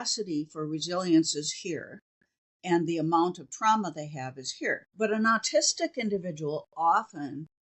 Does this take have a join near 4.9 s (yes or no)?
yes